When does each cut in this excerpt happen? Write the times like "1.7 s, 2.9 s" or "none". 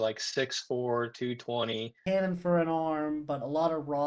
1.9 s